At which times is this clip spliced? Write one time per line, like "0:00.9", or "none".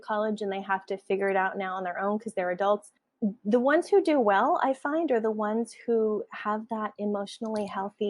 0:03.0